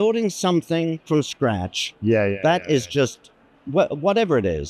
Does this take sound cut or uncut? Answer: cut